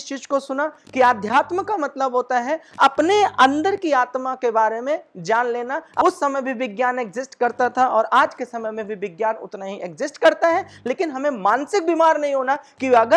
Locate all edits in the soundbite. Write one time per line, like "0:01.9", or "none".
0:06.0